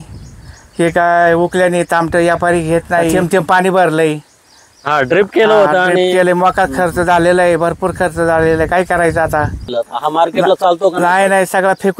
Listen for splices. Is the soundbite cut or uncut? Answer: cut